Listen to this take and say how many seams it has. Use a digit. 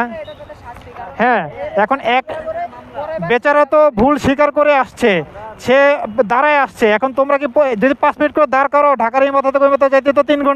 0